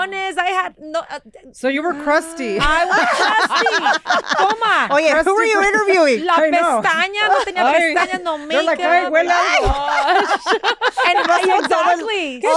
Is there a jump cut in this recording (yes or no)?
no